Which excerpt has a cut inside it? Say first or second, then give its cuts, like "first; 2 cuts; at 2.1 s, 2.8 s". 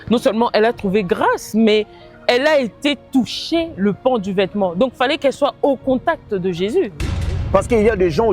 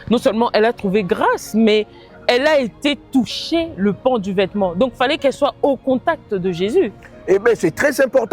first; 1 cut; at 7.1 s